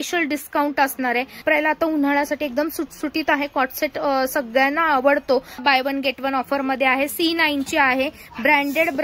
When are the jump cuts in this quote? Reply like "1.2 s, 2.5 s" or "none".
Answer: 1.4 s, 5.6 s